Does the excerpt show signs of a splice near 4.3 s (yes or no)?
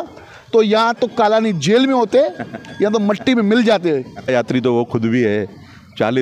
yes